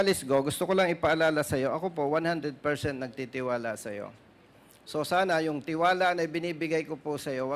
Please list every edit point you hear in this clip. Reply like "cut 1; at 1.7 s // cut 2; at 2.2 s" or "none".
none